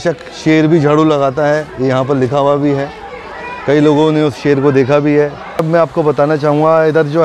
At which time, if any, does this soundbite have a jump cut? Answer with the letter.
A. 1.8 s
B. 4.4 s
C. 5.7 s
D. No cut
C